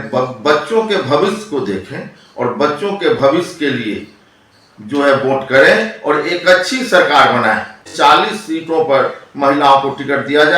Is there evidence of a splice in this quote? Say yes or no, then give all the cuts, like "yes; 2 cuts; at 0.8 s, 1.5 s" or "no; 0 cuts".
yes; 1 cut; at 7.9 s